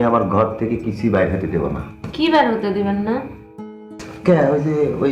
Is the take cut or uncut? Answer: uncut